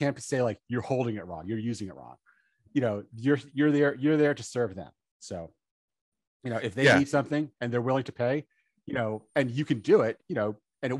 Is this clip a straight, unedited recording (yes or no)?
yes